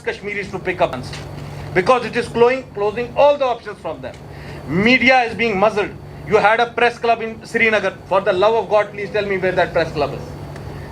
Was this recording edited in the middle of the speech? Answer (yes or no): yes